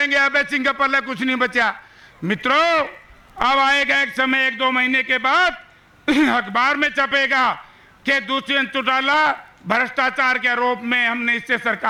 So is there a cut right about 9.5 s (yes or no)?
no